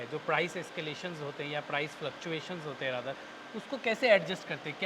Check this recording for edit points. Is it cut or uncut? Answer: uncut